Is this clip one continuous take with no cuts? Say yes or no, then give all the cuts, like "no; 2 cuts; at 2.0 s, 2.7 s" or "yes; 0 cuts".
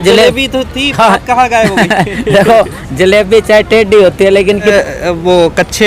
no; 1 cut; at 4.7 s